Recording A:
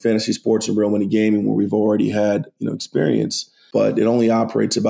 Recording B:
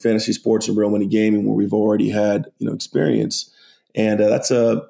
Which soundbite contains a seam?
A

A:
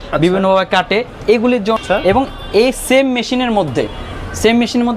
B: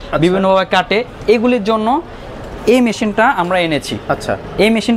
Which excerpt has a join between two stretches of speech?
A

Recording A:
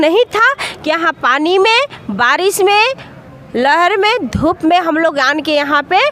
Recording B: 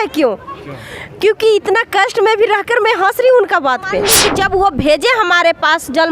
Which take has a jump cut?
B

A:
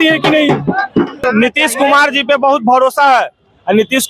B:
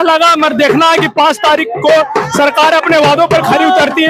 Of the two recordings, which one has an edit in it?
A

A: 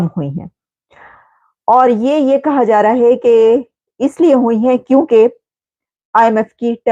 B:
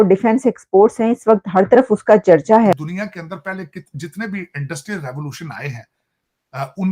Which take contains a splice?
B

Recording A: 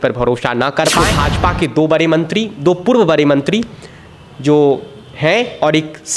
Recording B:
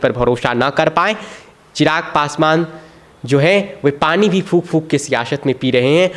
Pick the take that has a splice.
A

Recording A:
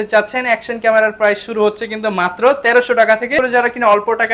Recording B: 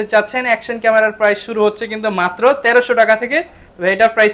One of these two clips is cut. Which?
A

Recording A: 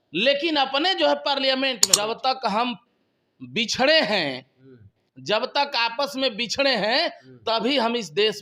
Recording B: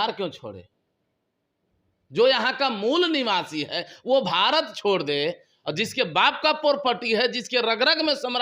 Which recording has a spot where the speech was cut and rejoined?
A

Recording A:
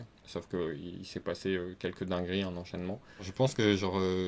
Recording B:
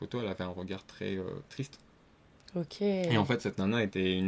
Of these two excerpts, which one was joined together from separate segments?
A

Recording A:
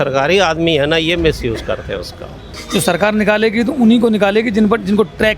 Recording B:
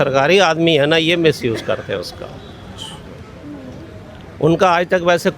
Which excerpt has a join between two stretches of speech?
A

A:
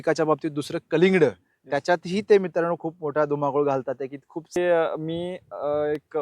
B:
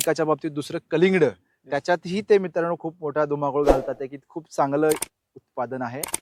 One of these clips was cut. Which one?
A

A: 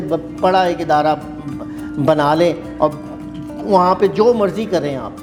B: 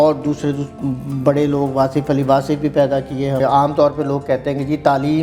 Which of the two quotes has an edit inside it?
B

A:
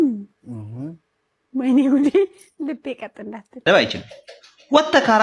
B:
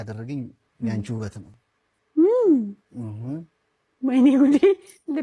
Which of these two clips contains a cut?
A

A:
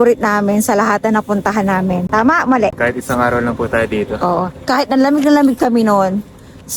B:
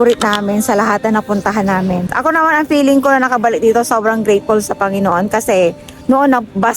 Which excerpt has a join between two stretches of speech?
B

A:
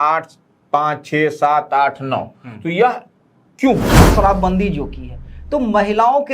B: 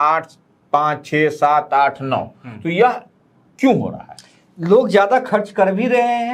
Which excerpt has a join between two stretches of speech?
A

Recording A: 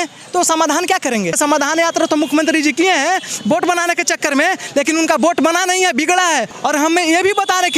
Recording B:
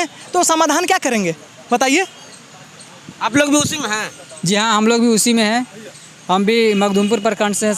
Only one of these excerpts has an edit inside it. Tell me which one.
A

